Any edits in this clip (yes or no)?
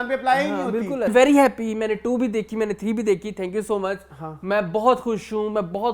yes